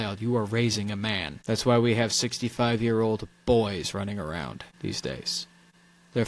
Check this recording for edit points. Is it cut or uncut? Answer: cut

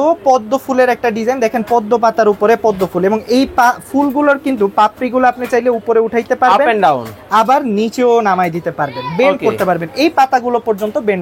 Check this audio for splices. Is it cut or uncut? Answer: uncut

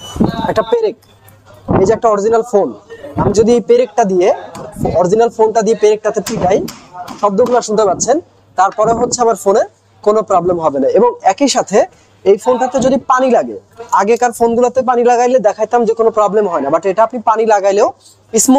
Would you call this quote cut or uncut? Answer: uncut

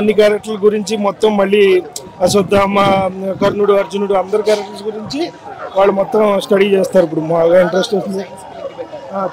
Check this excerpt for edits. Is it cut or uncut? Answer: uncut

